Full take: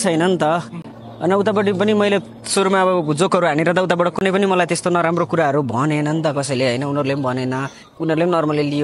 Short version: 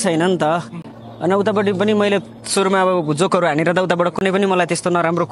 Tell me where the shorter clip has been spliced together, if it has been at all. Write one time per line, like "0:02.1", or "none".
none